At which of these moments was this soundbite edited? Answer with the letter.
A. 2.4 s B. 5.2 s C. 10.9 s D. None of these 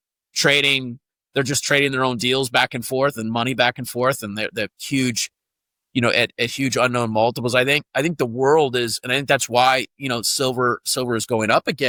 D